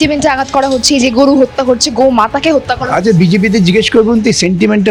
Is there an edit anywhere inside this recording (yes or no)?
no